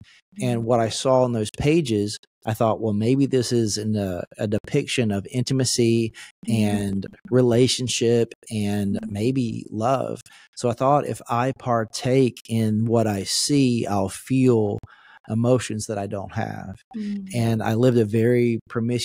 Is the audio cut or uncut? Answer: uncut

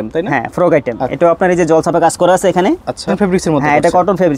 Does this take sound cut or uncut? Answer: cut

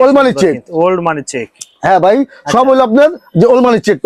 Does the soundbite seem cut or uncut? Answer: uncut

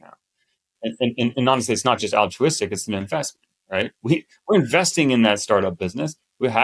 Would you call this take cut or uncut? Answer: uncut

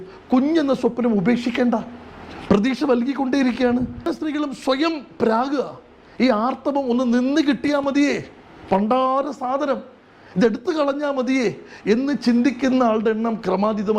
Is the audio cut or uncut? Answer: cut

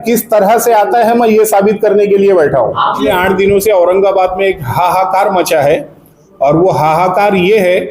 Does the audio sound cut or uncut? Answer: cut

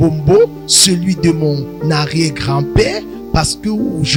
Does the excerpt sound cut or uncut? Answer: uncut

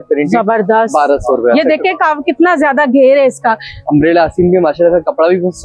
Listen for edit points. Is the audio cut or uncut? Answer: uncut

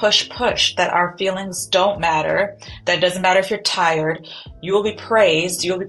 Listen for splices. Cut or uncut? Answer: uncut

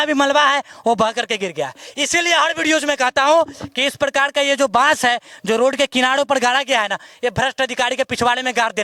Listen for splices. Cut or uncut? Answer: uncut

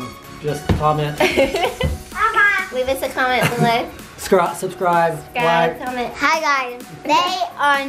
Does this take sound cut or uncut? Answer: uncut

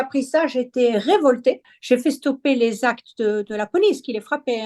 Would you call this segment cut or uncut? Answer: cut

